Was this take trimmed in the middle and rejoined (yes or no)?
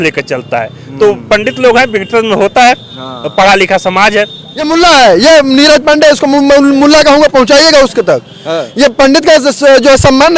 yes